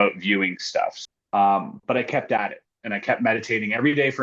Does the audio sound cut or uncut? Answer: cut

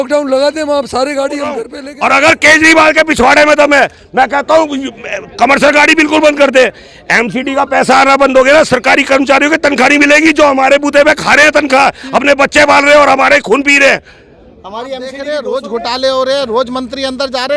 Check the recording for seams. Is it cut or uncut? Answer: cut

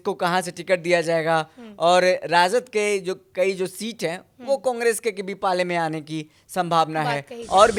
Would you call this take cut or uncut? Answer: uncut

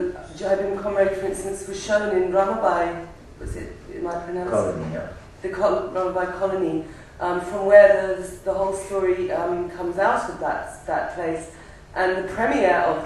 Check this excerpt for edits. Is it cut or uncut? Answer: uncut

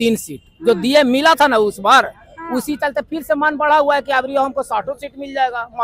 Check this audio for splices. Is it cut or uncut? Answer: uncut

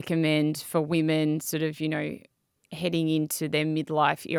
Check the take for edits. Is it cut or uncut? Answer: uncut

